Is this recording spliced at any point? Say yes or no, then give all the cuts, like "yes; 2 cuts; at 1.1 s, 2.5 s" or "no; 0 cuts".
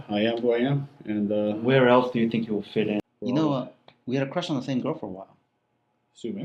yes; 1 cut; at 3.0 s